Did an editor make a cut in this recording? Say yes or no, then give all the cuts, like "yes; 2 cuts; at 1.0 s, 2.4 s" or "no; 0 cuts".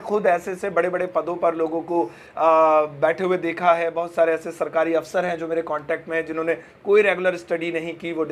no; 0 cuts